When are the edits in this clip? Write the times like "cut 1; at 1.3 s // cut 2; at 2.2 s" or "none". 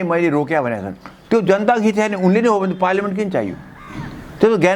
none